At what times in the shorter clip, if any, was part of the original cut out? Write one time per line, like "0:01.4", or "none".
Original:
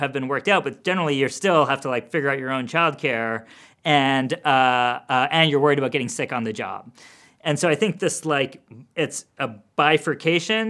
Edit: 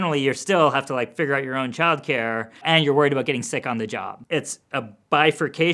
0:02.6
0:04.1